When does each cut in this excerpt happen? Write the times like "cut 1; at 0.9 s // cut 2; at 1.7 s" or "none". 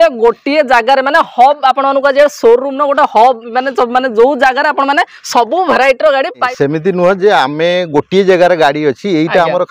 cut 1; at 6.5 s